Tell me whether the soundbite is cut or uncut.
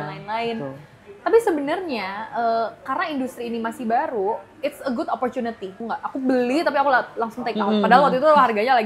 cut